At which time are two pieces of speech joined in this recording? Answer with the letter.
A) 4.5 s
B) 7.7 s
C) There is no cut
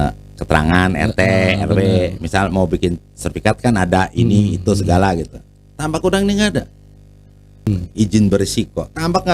B